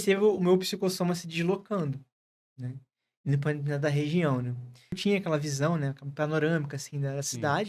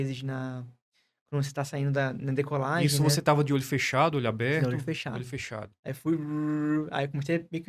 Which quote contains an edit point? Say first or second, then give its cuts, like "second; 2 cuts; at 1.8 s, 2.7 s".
first; 1 cut; at 5.0 s